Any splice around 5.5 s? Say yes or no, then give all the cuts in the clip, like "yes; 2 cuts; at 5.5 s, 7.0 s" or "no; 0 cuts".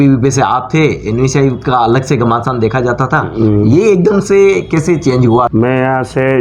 yes; 1 cut; at 5.5 s